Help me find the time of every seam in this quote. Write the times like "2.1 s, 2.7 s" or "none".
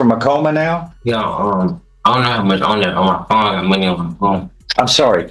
0.9 s